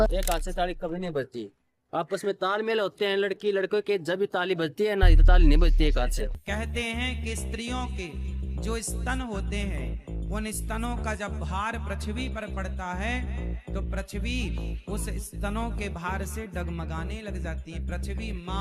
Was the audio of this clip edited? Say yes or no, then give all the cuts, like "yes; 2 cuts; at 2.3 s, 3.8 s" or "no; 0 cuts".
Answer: yes; 1 cut; at 6.3 s